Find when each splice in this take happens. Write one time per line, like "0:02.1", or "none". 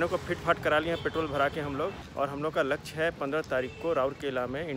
0:02.0